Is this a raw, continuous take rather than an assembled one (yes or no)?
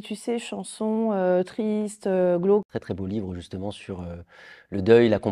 no